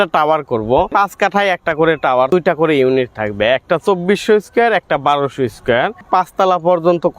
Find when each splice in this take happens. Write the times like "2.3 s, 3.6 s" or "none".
0.9 s, 2.3 s, 6.0 s